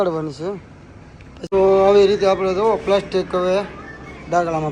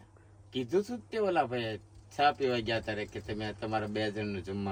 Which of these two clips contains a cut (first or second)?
first